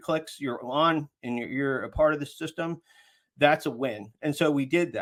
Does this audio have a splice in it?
no; 0 cuts

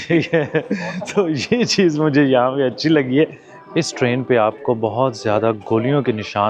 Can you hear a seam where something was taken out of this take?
yes; 1 cut; at 3.5 s

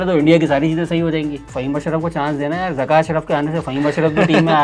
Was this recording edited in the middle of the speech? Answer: yes; 1 cut; at 1.5 s

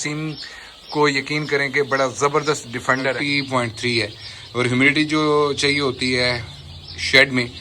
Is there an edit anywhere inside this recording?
yes; 1 cut; at 3.2 s

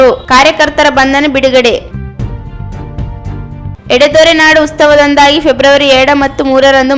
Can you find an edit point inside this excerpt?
yes; 2 cuts; at 1.9 s, 3.3 s

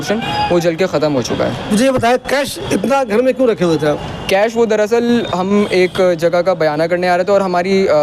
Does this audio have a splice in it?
no; 0 cuts

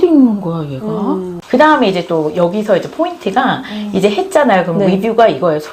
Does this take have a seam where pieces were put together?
yes; 1 cut; at 1.3 s

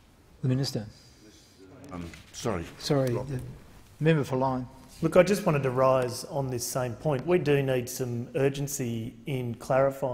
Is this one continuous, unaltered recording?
yes; 0 cuts

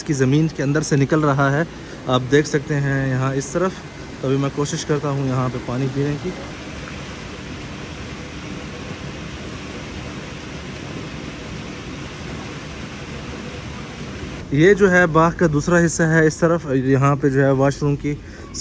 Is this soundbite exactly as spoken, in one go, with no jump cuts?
yes; 0 cuts

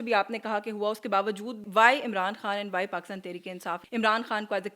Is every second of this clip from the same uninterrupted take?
no; 2 cuts; at 1.6 s, 3.8 s

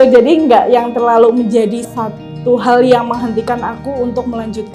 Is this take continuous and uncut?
no; 1 cut; at 1.9 s

